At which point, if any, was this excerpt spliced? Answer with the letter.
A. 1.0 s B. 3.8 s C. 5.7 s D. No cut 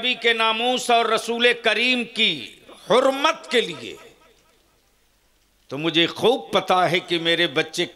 D